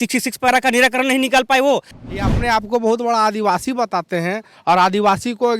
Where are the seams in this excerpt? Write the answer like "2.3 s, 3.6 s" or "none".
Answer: 1.9 s